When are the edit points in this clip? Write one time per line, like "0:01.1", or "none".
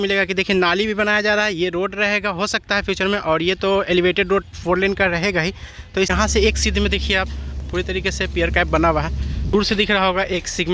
0:06.1
0:09.5